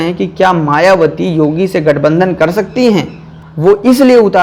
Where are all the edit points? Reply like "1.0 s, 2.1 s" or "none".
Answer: 3.2 s